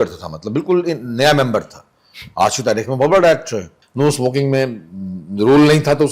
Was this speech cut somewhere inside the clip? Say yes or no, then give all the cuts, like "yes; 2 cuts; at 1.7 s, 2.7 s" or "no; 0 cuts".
yes; 1 cut; at 3.8 s